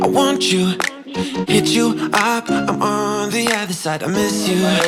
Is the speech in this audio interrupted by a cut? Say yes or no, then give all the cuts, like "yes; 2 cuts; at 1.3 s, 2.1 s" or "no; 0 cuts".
no; 0 cuts